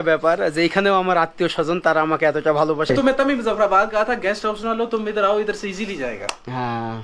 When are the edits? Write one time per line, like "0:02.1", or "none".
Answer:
0:02.9